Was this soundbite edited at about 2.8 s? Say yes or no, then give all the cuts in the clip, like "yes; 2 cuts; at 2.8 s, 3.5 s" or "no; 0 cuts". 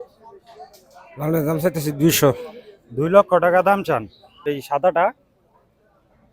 no; 1 cut; at 4.4 s